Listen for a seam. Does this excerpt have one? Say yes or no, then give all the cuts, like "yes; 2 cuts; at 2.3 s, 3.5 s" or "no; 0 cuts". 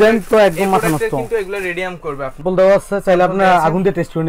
yes; 1 cut; at 2.4 s